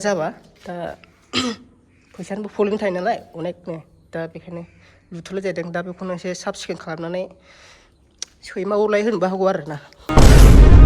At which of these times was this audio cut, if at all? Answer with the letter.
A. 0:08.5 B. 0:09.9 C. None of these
B